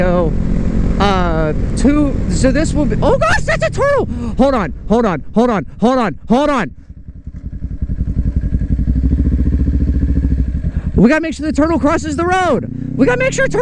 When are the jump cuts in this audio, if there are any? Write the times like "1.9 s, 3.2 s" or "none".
none